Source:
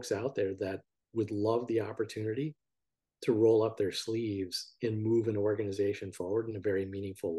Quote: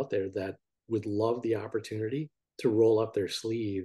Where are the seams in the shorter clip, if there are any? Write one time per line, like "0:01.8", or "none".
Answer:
0:02.4